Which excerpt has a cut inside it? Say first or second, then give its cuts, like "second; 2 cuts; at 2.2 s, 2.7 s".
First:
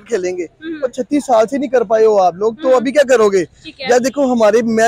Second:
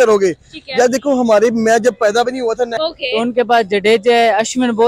second; 1 cut; at 2.7 s